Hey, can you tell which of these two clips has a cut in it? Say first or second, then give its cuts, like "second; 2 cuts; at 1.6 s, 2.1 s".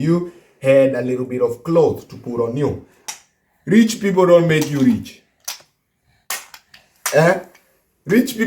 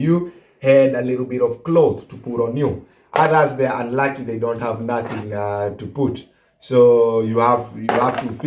first; 1 cut; at 2.9 s